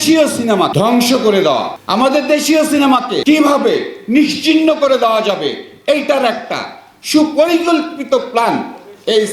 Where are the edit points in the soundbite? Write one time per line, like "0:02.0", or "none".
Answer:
0:00.7
0:01.8
0:03.2